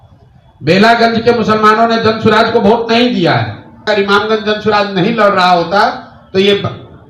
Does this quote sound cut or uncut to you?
cut